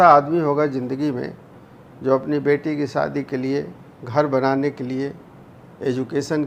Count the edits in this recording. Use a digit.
0